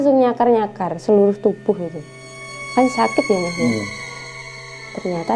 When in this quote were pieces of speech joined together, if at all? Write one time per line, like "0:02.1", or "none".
0:04.3